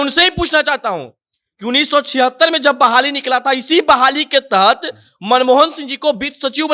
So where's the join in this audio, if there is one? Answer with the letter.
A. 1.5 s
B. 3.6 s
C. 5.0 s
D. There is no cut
D